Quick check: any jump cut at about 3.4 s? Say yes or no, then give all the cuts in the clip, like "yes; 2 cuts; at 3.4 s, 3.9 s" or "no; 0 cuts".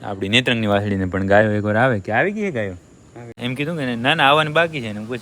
yes; 1 cut; at 3.4 s